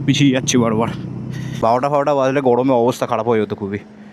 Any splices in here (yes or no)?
yes